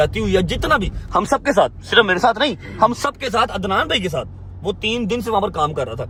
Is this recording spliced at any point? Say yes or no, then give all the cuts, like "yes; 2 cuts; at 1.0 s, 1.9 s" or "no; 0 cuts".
no; 0 cuts